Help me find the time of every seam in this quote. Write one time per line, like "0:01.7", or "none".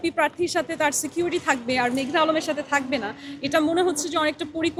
none